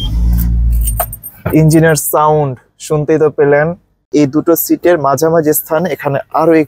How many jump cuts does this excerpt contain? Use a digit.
1